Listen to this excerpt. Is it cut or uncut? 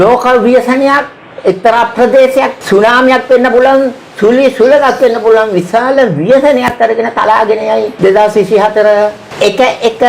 cut